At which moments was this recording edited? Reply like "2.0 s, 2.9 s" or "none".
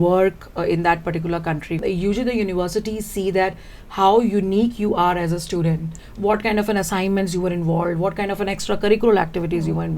1.8 s, 6.0 s